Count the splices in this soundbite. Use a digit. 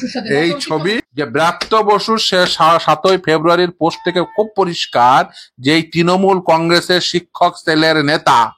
1